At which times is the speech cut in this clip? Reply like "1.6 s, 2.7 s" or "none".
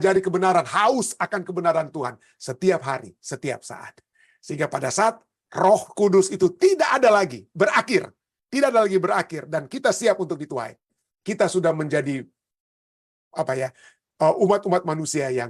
none